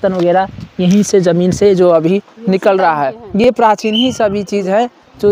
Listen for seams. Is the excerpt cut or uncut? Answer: uncut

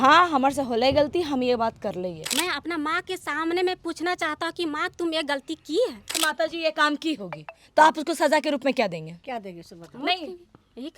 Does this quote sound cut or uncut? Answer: cut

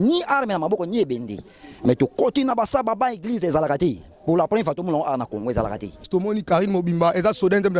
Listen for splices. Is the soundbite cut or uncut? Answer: cut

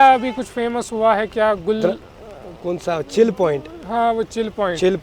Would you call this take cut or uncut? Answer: uncut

